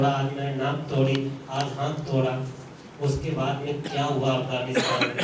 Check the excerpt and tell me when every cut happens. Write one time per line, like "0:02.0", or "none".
none